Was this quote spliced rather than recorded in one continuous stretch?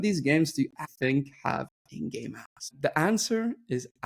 yes; 1 cut; at 0.9 s

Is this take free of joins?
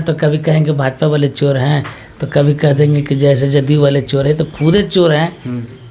yes; 0 cuts

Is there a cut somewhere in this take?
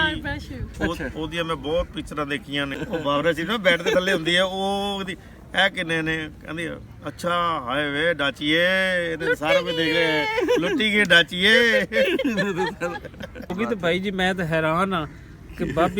yes; 2 cuts; at 2.7 s, 13.5 s

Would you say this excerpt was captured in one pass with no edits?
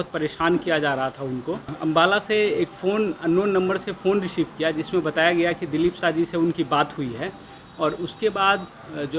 no; 1 cut; at 1.7 s

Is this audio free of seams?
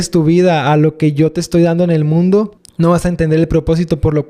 no; 1 cut; at 2.6 s

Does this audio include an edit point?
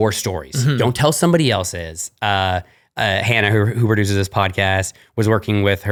no; 0 cuts

